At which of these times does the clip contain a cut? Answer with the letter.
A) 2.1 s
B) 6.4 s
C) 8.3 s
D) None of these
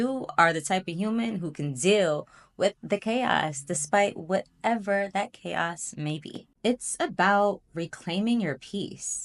B